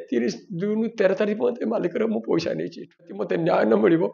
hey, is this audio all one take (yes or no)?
no